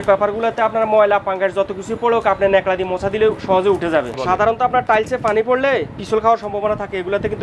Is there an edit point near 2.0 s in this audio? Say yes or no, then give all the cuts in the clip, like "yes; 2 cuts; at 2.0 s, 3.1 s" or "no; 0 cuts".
no; 1 cut; at 4.1 s